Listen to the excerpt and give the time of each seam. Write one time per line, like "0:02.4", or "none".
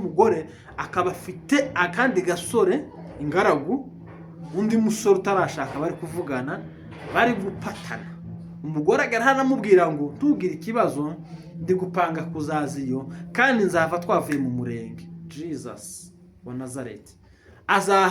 none